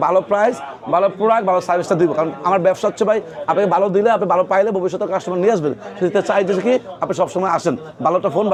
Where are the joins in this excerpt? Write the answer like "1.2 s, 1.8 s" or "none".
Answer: none